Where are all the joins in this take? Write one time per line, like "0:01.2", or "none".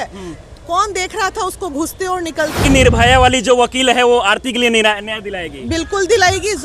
0:02.6